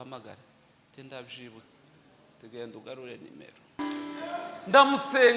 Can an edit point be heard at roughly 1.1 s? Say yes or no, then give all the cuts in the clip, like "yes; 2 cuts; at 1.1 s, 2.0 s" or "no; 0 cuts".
no; 1 cut; at 3.8 s